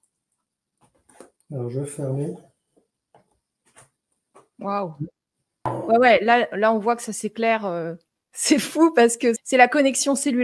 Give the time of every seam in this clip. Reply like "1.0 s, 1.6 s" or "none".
5.7 s, 9.4 s